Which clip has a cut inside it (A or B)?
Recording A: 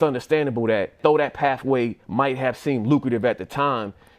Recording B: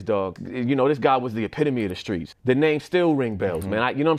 A